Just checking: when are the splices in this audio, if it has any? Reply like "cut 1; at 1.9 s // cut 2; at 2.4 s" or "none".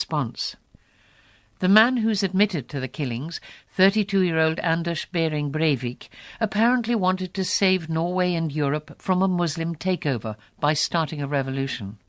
cut 1; at 2.2 s